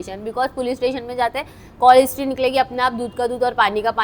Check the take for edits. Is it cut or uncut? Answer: uncut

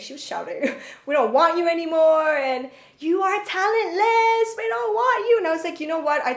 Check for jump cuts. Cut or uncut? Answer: uncut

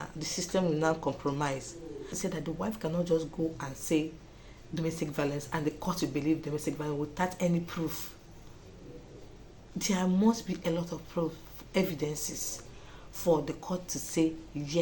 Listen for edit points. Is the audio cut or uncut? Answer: cut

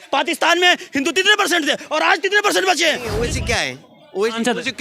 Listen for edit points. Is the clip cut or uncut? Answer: cut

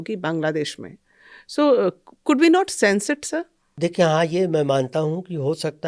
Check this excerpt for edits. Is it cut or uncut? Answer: cut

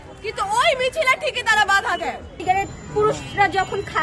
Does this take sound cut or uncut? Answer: cut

